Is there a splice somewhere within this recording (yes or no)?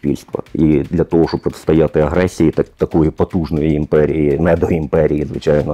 no